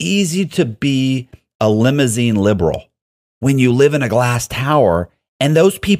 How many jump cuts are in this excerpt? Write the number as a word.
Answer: zero